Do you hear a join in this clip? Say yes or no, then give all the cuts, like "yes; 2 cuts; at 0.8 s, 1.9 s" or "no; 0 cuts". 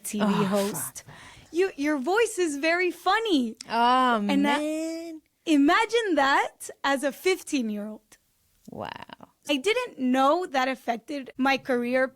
yes; 2 cuts; at 9.5 s, 11.2 s